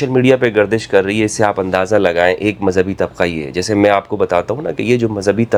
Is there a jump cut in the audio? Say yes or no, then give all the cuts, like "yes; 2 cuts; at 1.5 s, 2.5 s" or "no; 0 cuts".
no; 0 cuts